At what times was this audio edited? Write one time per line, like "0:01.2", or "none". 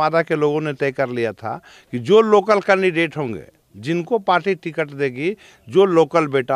none